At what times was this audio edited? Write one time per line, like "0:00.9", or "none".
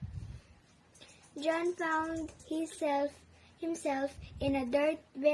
0:04.2

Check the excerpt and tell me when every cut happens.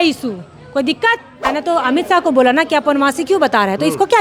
0:01.5

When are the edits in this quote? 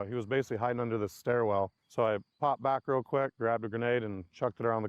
0:01.8

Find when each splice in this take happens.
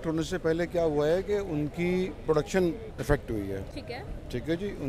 none

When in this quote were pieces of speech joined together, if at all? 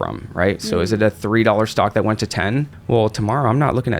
0:02.8

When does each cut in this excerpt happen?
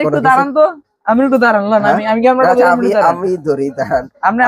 none

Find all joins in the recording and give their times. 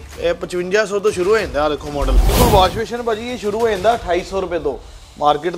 0:02.3

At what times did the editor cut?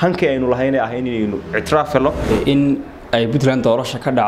0:02.3

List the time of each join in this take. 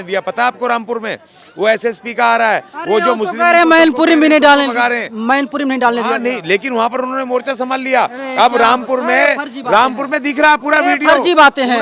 none

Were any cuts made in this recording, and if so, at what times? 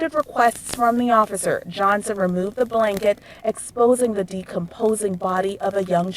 none

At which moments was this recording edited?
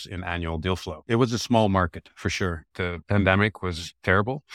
0:01.0
0:02.6

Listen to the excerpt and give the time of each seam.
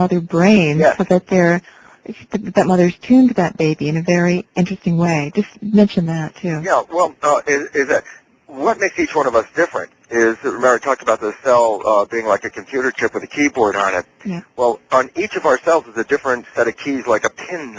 none

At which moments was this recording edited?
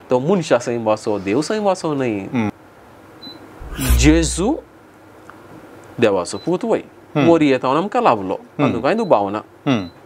0:02.5

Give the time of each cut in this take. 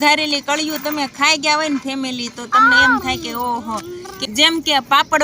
0:04.1

